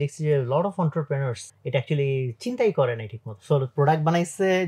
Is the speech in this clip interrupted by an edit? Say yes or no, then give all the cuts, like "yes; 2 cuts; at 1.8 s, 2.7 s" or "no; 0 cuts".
yes; 1 cut; at 1.5 s